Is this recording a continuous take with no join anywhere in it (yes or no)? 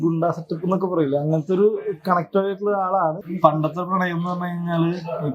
no